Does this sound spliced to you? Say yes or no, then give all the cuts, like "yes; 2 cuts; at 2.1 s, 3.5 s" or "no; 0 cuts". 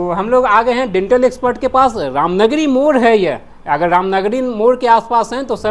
no; 0 cuts